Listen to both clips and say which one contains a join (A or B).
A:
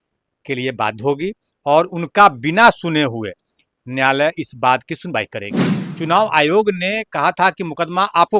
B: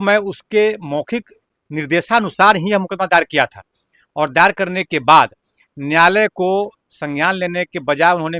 A